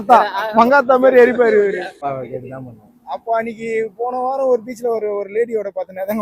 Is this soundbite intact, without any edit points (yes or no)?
no